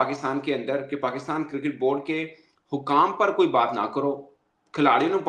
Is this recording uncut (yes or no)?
yes